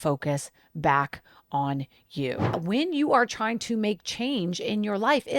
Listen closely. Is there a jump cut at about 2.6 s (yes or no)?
yes